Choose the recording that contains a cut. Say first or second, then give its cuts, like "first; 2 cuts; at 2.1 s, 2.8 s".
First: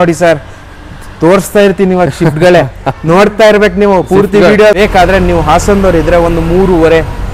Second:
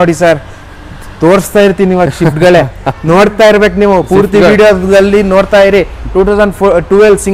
first; 1 cut; at 4.8 s